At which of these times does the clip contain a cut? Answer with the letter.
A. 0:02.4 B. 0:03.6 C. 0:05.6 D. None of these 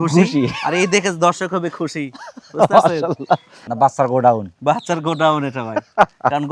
B